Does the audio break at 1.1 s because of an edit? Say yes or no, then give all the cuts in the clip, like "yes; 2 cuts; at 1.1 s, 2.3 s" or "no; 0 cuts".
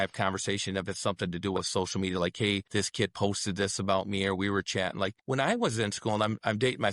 no; 2 cuts; at 2.7 s, 5.2 s